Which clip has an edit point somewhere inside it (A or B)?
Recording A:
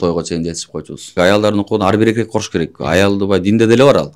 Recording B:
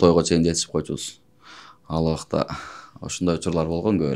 A